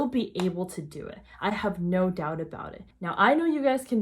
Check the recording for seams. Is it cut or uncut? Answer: cut